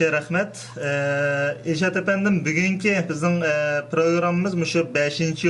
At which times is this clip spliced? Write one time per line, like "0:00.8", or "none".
none